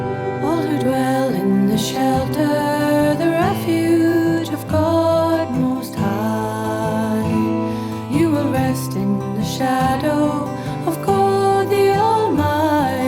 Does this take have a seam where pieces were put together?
no; 0 cuts

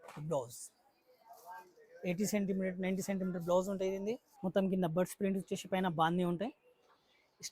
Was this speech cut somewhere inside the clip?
yes; 1 cut; at 4.3 s

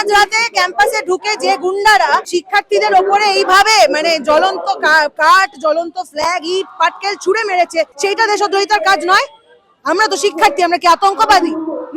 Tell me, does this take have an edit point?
yes; 2 cuts; at 2.3 s, 7.9 s

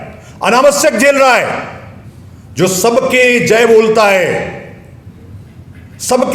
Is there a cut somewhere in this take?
no; 0 cuts

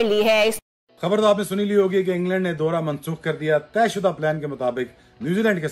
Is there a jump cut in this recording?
no; 0 cuts

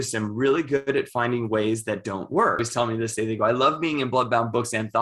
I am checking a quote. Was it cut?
yes; 1 cut; at 2.7 s

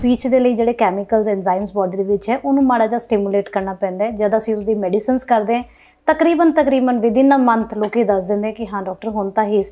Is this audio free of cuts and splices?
yes; 0 cuts

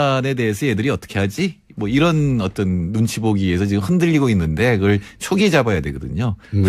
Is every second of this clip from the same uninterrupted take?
no; 1 cut; at 2.0 s

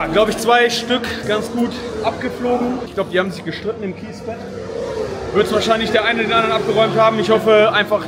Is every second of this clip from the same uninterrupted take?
yes; 0 cuts

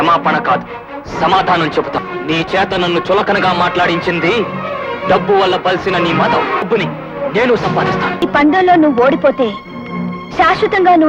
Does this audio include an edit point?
yes; 3 cuts; at 2.0 s, 6.7 s, 8.2 s

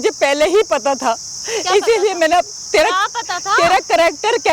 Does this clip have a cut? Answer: no; 0 cuts

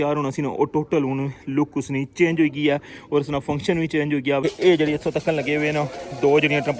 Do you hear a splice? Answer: yes; 1 cut; at 4.4 s

